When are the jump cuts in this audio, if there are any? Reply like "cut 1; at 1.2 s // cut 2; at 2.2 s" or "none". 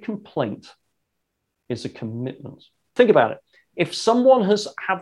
cut 1; at 2.8 s